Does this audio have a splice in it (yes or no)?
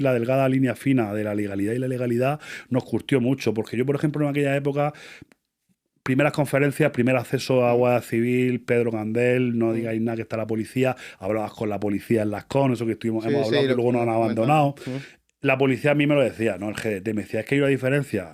no